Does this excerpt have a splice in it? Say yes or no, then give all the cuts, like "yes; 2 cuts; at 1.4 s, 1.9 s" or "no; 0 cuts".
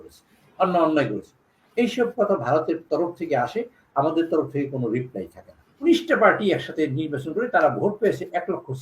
yes; 1 cut; at 5.8 s